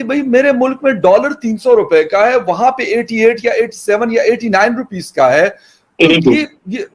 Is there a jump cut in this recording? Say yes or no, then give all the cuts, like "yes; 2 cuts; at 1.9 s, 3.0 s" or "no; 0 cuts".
no; 0 cuts